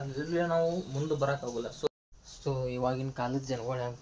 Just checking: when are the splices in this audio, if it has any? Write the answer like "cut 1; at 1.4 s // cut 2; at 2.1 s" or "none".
cut 1; at 1.9 s